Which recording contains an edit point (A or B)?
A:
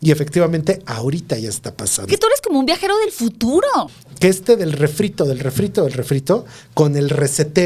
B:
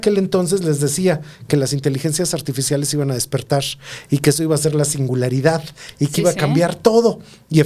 A